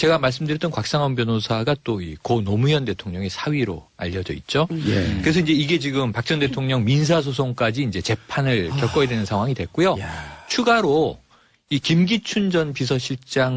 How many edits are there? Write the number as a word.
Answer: one